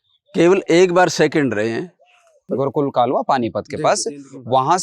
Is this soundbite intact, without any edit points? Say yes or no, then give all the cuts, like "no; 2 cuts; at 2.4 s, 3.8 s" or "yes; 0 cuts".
no; 1 cut; at 2.4 s